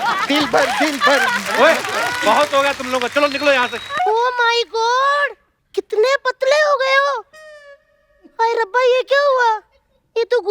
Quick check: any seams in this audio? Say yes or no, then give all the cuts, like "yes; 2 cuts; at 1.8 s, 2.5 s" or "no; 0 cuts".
yes; 1 cut; at 3.9 s